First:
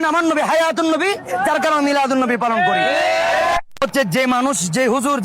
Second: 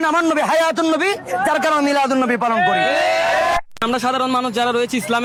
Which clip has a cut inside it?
first; 1 cut; at 3.8 s

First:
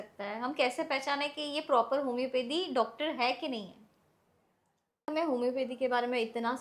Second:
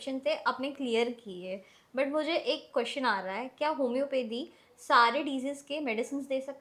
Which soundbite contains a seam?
first; 1 cut; at 5.1 s

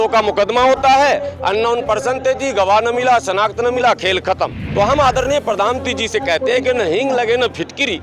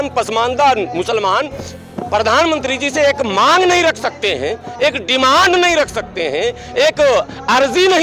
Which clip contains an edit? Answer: first; 1 cut; at 4.6 s

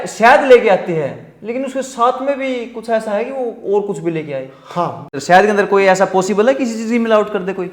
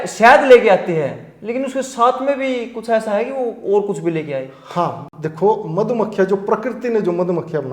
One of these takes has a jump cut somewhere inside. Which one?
first; 1 cut; at 5.1 s

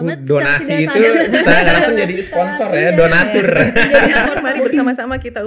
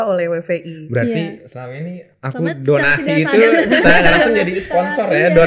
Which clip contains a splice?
first; 1 cut; at 4.4 s

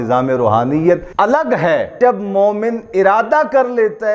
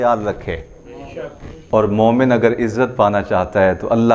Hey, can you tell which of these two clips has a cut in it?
first; 2 cuts; at 1.1 s, 2.0 s

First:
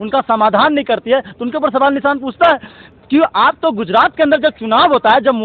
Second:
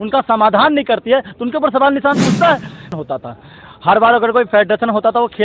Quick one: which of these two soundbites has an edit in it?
second; 1 cut; at 3.0 s

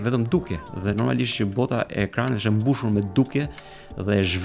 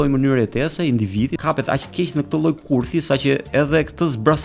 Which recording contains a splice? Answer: second; 1 cut; at 1.4 s

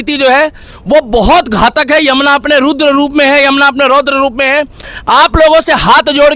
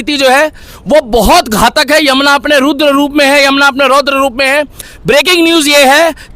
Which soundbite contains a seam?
second; 1 cut; at 4.9 s

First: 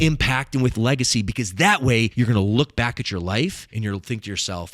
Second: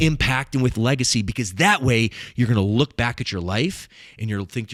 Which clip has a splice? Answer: first; 2 cuts; at 2.1 s, 3.7 s

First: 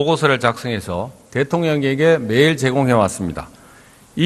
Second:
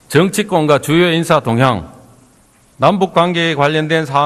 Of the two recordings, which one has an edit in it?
second; 1 cut; at 1.7 s

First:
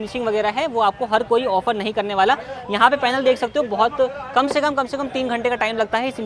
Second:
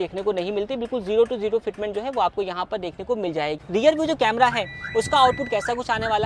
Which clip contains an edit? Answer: second; 1 cut; at 3.6 s

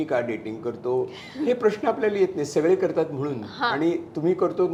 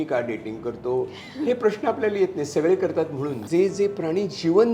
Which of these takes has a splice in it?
second; 1 cut; at 3.4 s

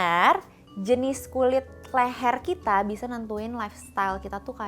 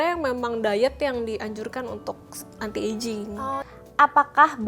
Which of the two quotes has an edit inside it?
second; 1 cut; at 3.6 s

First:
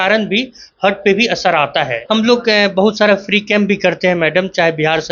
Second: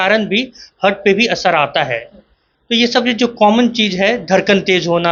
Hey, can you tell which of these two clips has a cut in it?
first; 1 cut; at 2.0 s

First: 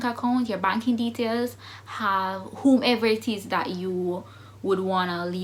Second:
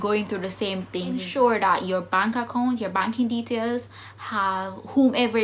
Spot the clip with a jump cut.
second; 1 cut; at 1.3 s

